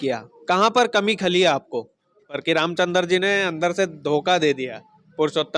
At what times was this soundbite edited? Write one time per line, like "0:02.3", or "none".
0:02.4